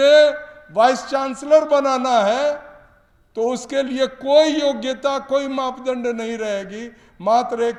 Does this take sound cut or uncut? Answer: uncut